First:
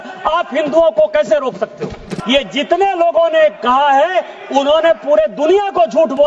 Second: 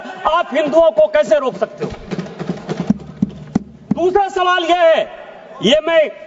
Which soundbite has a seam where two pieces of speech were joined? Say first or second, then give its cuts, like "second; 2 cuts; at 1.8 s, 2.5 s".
first; 1 cut; at 2.1 s